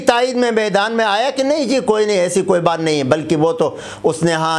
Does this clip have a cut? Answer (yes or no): no